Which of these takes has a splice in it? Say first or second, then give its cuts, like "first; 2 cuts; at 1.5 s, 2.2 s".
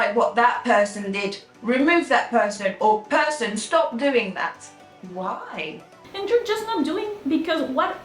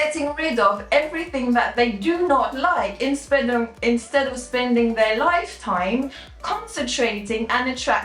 first; 1 cut; at 6.1 s